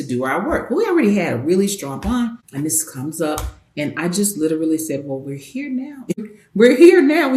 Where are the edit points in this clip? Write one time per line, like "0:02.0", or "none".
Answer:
0:02.4
0:06.3